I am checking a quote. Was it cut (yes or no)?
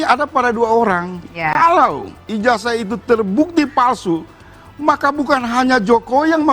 yes